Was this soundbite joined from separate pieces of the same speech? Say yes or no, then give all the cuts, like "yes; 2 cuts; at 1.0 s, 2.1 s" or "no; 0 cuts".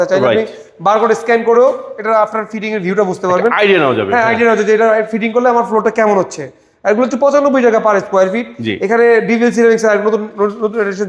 no; 0 cuts